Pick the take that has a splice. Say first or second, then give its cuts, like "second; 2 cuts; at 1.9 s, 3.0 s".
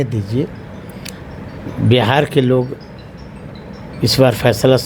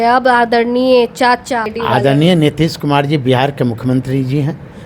second; 1 cut; at 1.7 s